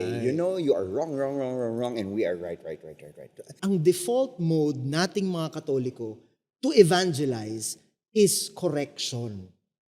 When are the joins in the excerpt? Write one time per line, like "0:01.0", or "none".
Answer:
0:03.5